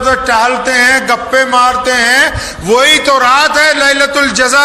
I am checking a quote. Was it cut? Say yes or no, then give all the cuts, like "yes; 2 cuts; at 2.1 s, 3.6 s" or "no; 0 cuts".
no; 0 cuts